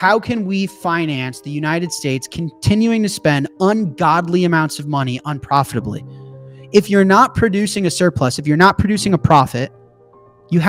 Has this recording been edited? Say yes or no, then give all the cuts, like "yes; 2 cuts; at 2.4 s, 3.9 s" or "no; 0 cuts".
no; 0 cuts